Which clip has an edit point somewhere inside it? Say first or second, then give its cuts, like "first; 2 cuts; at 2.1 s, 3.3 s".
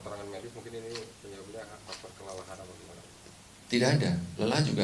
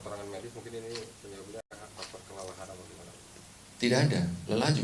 first; 1 cut; at 1.7 s